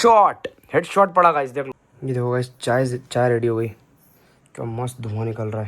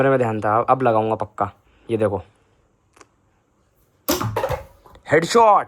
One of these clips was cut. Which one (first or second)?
first